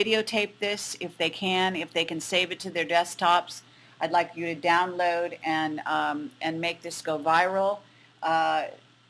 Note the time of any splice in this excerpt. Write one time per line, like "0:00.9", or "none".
0:05.0